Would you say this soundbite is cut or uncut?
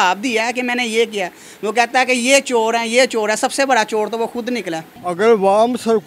cut